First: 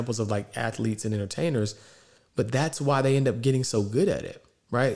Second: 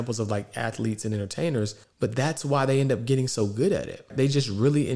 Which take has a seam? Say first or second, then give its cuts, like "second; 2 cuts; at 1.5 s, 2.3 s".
second; 2 cuts; at 1.8 s, 4.1 s